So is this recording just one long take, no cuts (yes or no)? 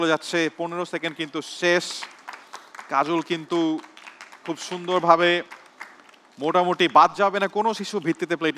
yes